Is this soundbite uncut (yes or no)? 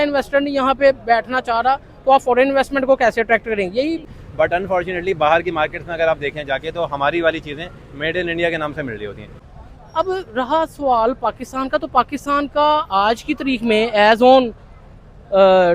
no